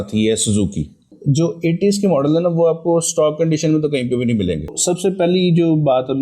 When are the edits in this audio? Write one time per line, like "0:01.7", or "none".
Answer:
0:01.1
0:04.8